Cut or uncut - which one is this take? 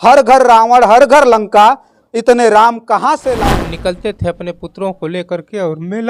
cut